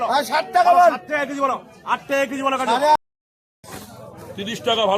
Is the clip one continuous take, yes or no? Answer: no